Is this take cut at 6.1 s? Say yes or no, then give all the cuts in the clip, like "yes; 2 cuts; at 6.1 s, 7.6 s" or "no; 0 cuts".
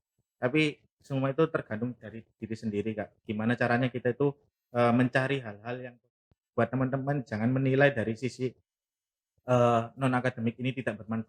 yes; 1 cut; at 6.1 s